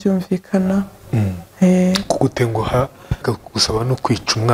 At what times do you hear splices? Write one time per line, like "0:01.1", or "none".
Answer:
0:03.3